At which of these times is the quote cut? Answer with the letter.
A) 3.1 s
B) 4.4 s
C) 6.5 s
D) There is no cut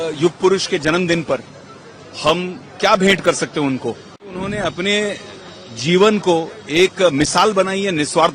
B